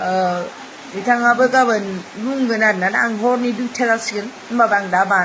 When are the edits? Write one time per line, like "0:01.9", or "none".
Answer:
none